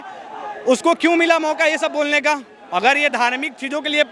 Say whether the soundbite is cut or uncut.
uncut